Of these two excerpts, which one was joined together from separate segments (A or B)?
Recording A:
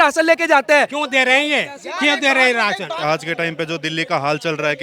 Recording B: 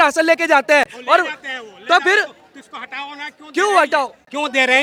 A